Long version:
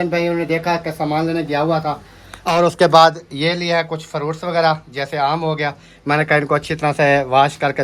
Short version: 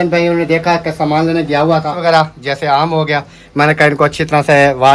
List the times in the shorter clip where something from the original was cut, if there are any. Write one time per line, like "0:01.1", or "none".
0:01.9